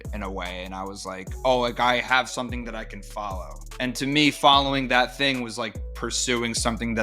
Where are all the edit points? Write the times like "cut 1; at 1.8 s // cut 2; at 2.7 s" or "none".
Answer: cut 1; at 3.6 s